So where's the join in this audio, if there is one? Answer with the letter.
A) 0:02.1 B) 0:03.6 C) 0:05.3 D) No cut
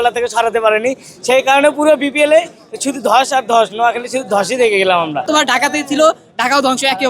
C